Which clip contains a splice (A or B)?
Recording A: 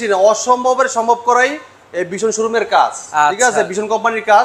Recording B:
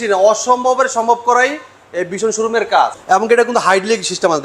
B